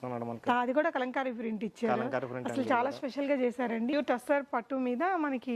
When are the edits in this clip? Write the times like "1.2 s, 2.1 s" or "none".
3.9 s